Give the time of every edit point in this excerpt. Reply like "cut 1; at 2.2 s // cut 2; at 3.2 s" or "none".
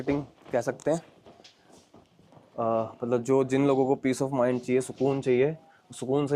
none